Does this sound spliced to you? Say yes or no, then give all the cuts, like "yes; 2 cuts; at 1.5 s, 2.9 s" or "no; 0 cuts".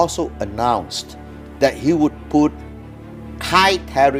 no; 0 cuts